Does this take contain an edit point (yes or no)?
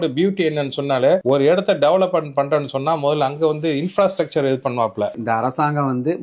yes